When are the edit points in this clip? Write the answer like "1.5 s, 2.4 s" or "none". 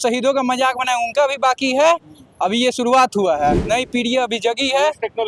none